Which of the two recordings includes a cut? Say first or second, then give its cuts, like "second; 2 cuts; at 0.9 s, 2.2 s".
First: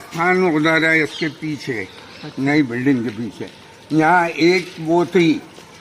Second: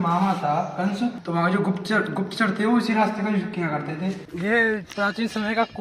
second; 2 cuts; at 1.2 s, 4.3 s